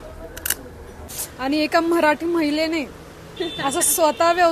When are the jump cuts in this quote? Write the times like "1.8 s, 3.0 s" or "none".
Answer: 1.2 s

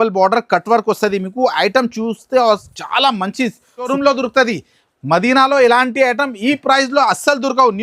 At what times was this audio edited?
3.9 s

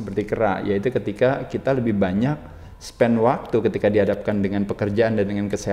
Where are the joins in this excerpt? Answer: none

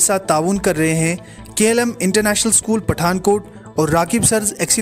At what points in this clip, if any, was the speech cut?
none

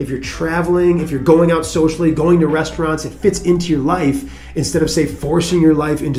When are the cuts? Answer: none

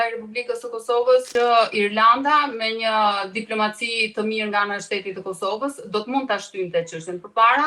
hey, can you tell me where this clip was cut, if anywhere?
1.3 s

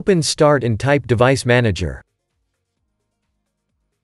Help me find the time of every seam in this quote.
2.1 s

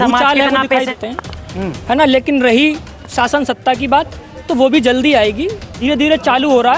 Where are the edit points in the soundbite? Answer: 0.9 s, 5.8 s

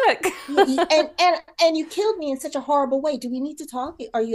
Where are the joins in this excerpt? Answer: none

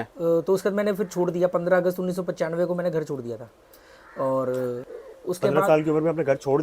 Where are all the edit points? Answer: 4.9 s

